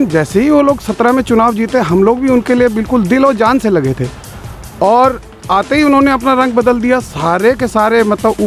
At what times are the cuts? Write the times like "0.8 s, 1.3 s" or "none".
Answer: none

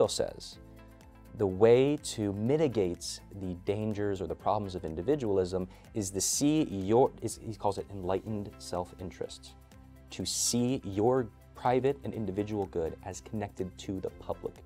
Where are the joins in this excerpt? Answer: none

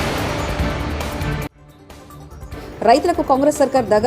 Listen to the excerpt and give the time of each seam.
1.6 s

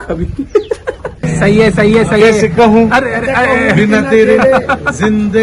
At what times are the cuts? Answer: 1.4 s

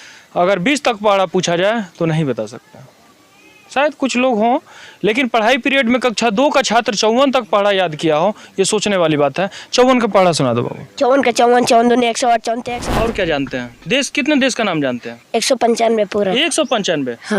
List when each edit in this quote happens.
12.6 s

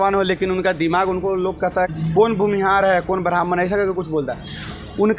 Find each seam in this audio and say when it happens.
1.9 s

